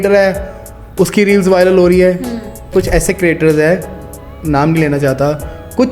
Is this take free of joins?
no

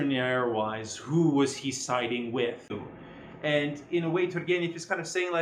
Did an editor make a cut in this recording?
yes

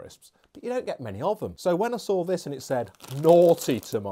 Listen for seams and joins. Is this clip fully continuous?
no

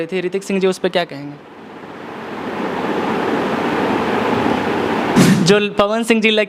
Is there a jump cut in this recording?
yes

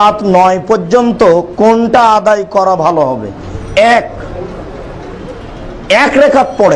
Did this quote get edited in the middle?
no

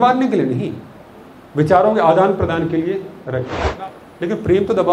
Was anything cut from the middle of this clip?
yes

